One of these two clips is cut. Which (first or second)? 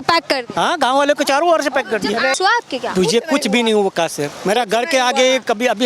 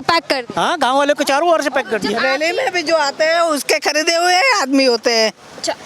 first